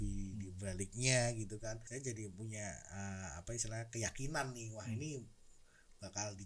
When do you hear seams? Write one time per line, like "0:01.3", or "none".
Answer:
0:01.8